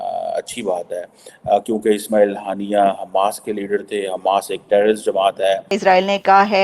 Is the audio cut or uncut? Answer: cut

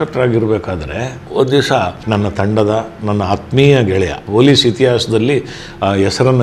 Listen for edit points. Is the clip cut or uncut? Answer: cut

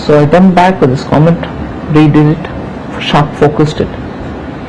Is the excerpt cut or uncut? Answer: cut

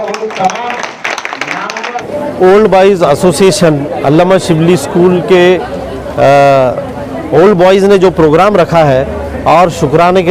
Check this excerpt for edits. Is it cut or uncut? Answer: cut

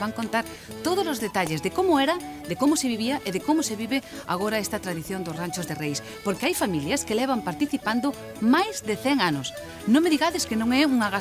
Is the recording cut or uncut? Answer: cut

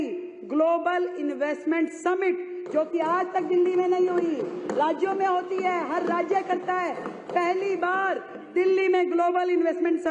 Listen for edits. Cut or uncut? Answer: uncut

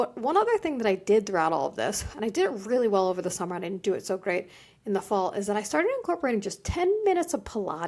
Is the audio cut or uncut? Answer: uncut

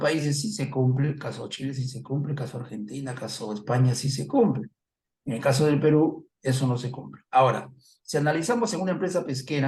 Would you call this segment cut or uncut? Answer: uncut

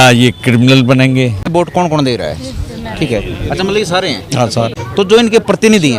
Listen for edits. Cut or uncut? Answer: cut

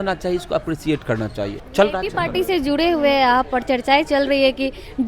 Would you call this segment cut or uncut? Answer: cut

